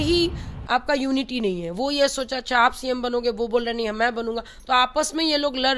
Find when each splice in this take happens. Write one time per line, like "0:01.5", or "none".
none